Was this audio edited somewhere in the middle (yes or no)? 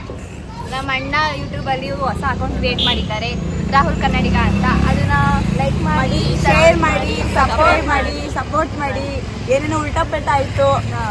no